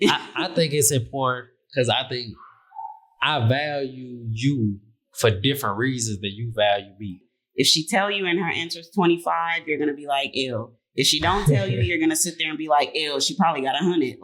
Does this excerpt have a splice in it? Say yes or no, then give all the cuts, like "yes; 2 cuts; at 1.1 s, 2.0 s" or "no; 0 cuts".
yes; 1 cut; at 7.4 s